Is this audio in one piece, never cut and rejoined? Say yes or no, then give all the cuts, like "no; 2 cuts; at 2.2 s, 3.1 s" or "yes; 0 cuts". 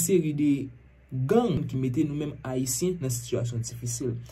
no; 1 cut; at 1.6 s